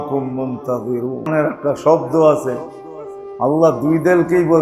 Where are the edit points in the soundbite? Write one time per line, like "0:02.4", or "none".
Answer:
0:01.3